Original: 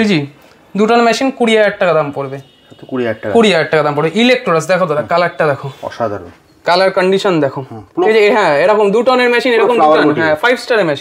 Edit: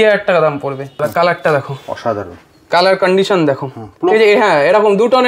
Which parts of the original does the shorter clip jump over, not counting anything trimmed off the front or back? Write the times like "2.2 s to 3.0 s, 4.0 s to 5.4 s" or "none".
2.5 s to 4.9 s